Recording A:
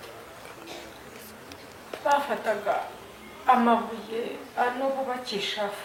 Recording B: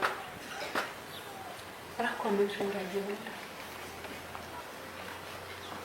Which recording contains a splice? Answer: B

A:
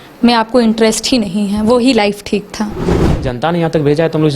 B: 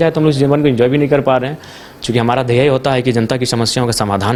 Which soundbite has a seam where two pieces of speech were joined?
A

